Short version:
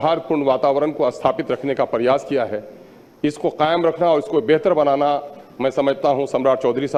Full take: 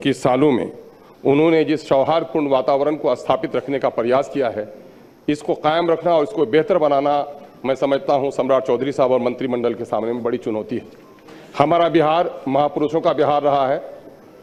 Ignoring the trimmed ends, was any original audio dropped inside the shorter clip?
no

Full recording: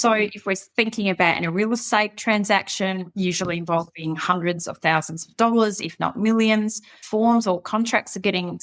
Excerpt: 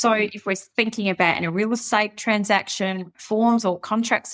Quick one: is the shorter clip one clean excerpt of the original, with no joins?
no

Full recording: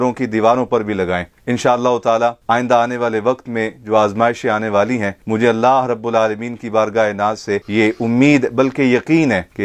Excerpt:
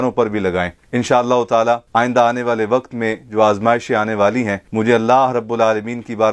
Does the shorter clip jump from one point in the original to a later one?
no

